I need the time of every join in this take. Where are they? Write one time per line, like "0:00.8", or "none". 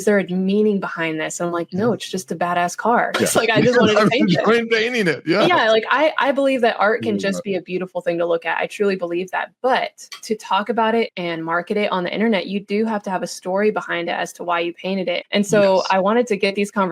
0:15.2